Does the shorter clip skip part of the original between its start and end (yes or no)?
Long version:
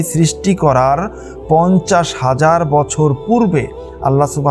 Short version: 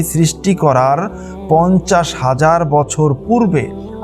no